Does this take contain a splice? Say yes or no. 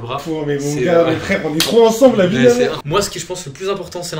yes